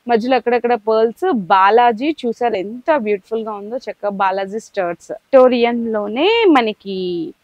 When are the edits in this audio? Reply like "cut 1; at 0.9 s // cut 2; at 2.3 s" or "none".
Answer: cut 1; at 5.2 s